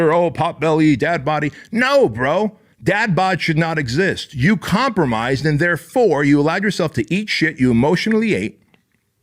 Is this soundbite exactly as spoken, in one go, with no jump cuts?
yes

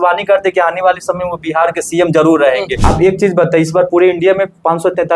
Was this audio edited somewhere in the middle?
yes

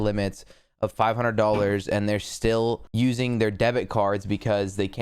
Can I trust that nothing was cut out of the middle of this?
no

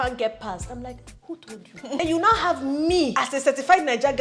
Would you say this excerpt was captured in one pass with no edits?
no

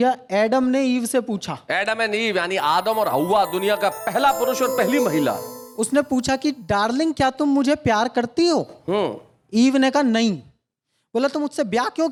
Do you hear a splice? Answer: no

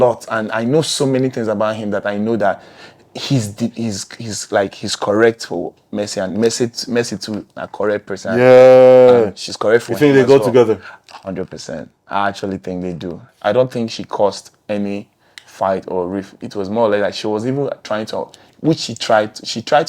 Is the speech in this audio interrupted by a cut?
yes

